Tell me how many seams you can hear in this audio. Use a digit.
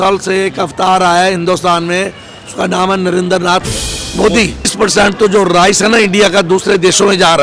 1